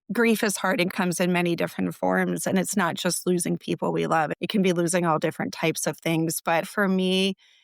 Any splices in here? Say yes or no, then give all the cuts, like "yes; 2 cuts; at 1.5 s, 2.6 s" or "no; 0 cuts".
yes; 3 cuts; at 0.9 s, 4.3 s, 6.6 s